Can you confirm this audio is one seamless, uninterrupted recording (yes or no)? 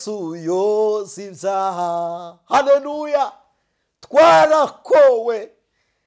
yes